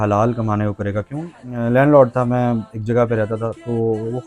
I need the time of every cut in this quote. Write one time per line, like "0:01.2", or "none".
0:01.4